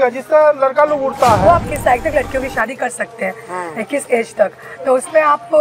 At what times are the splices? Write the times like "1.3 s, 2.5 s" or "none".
1.7 s

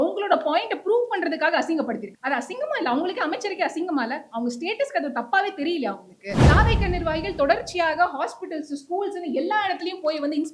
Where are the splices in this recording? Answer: 2.1 s, 6.4 s

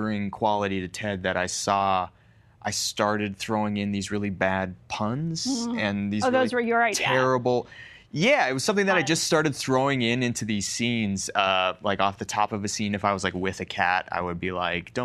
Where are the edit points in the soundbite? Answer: none

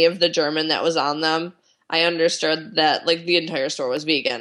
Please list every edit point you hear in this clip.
none

